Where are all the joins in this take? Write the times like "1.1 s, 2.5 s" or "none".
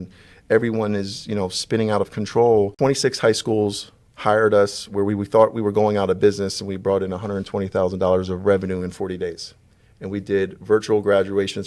2.7 s